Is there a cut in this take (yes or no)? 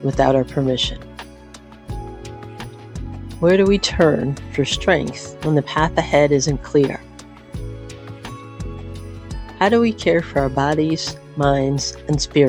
no